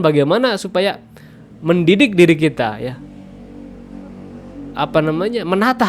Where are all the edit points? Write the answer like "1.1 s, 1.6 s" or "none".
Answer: none